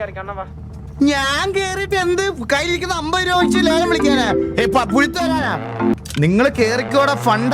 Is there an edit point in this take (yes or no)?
yes